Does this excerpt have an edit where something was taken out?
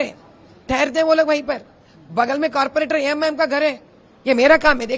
no; 0 cuts

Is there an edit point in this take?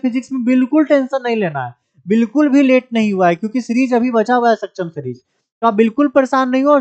no; 0 cuts

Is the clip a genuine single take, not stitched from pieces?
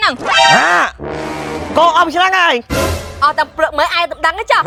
yes; 0 cuts

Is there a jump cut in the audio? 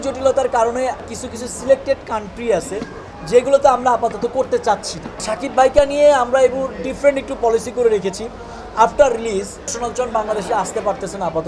yes; 3 cuts; at 1.0 s, 5.3 s, 9.8 s

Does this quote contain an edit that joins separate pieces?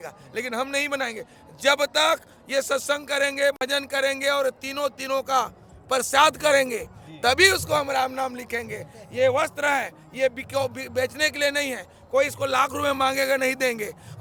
no; 0 cuts

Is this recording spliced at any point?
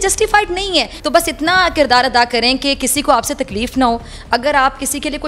yes; 1 cut; at 1.0 s

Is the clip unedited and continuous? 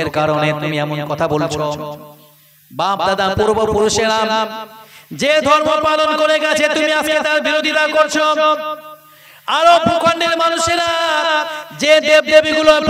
yes; 0 cuts

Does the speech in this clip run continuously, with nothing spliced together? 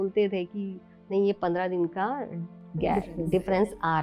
yes; 0 cuts

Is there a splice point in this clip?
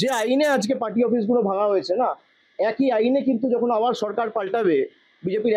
no; 0 cuts

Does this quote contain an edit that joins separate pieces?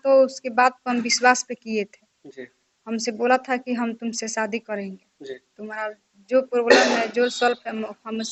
no; 0 cuts

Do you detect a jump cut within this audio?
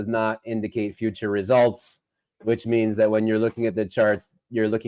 no; 0 cuts

